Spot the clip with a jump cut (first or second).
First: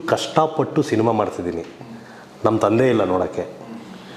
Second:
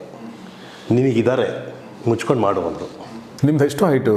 second